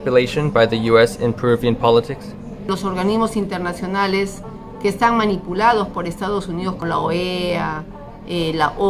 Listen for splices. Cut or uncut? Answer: cut